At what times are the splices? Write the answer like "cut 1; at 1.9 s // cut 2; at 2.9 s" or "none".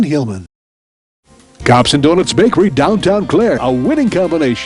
cut 1; at 1.0 s